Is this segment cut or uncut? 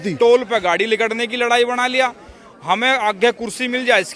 uncut